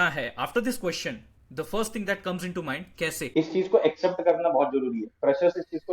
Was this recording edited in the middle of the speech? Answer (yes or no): yes